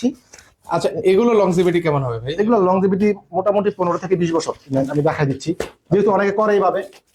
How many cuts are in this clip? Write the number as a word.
one